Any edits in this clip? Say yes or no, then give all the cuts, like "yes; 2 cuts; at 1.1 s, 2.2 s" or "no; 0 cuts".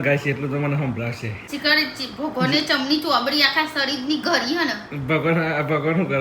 yes; 1 cut; at 1.4 s